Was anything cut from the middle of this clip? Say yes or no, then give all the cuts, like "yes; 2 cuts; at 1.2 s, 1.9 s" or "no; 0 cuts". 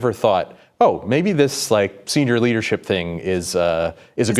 no; 0 cuts